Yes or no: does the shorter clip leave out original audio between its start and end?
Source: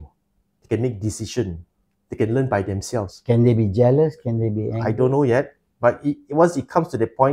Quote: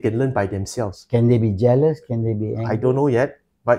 no